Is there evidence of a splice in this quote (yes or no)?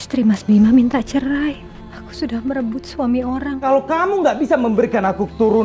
yes